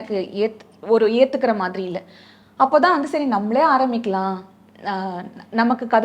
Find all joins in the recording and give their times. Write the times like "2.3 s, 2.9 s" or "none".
none